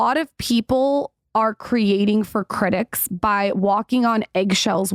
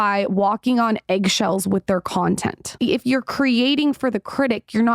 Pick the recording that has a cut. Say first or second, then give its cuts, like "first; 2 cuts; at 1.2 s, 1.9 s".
second; 1 cut; at 2.7 s